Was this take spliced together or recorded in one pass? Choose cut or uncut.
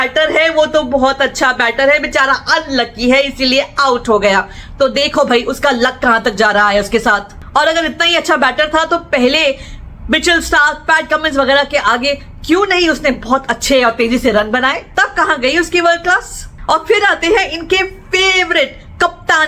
uncut